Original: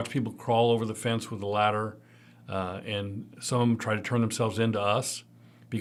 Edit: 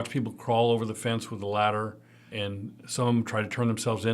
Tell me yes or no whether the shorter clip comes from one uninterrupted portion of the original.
no